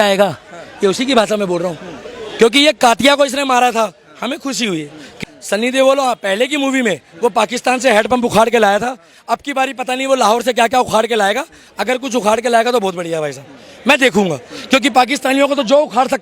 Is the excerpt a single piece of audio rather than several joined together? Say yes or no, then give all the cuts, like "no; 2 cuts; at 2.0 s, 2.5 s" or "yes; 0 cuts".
no; 1 cut; at 5.1 s